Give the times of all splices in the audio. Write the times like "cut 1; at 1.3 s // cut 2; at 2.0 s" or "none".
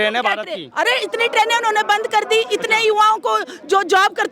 none